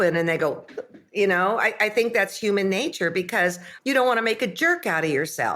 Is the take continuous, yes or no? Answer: no